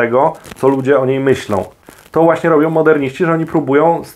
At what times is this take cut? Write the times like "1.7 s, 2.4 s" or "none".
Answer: 1.8 s